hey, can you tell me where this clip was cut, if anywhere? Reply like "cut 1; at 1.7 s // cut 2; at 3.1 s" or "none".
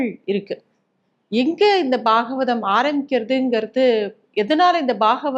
none

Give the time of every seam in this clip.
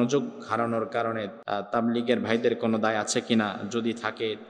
cut 1; at 1.4 s

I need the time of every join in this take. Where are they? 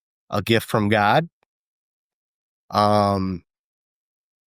none

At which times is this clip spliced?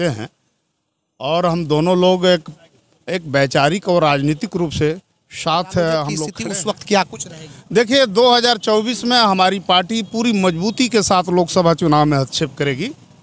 cut 1; at 6.3 s

